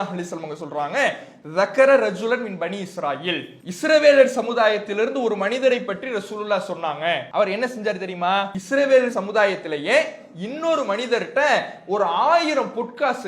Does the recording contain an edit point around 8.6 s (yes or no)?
yes